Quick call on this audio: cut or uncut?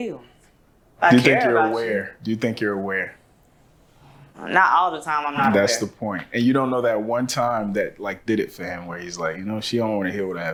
uncut